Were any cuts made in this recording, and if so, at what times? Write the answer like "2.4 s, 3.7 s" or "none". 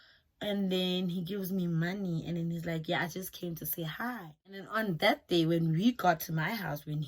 4.7 s